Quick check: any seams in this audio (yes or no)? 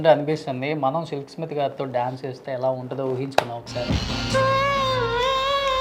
no